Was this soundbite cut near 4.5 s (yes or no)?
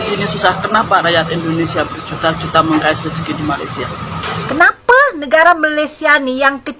yes